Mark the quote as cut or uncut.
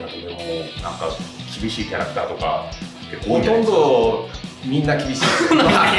uncut